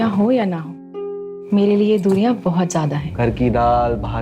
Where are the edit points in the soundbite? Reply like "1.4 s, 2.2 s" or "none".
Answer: 3.1 s